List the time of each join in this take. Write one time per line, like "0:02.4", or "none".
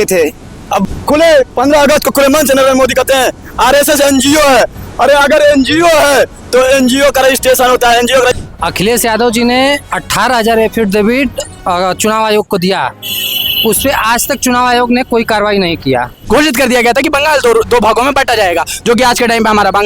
0:00.8
0:08.4
0:16.1